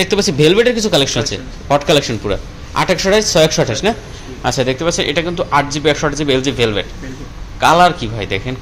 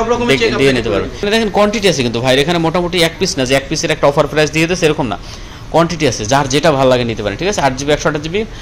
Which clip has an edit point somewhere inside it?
second; 1 cut; at 1.2 s

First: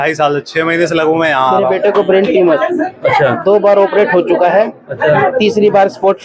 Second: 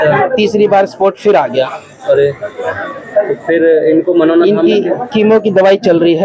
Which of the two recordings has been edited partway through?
first; 1 cut; at 1.7 s

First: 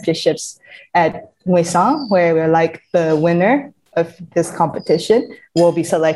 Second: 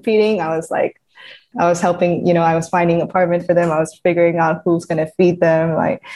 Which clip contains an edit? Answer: second; 1 cut; at 1.5 s

